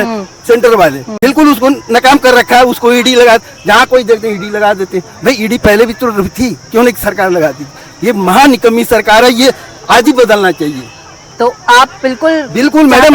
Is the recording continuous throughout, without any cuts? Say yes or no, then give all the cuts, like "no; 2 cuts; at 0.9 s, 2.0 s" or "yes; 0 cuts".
yes; 0 cuts